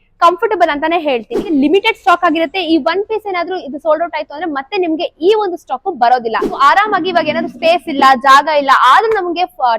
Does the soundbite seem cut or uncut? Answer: cut